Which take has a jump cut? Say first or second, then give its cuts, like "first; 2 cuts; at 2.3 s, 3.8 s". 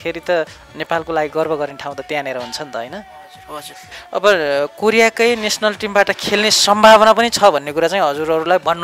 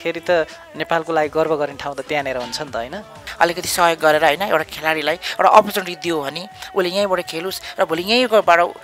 second; 1 cut; at 3.2 s